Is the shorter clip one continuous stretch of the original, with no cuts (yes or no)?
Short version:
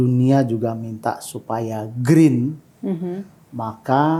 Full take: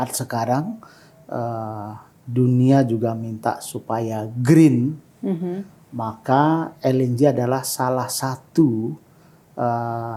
yes